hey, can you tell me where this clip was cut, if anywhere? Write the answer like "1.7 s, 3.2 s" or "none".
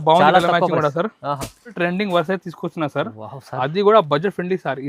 1.8 s

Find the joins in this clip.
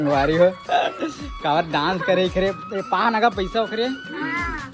none

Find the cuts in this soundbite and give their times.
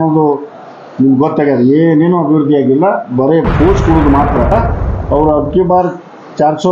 4.5 s

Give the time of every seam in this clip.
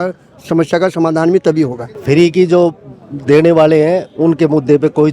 2.0 s

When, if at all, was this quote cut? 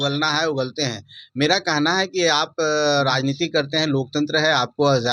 none

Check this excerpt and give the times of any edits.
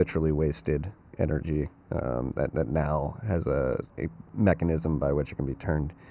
3.9 s

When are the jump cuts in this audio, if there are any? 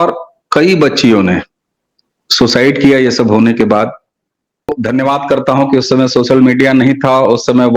4.8 s

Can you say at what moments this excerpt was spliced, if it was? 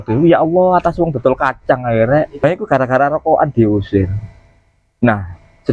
2.4 s

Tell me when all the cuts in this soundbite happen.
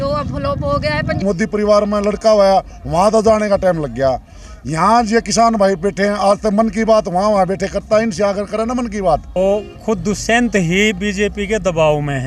1.2 s, 9.3 s

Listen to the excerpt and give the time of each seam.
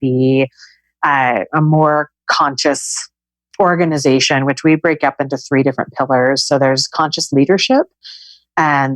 none

